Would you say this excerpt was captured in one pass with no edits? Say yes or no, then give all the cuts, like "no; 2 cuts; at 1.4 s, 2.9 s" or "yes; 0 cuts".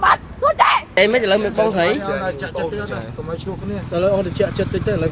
no; 1 cut; at 0.9 s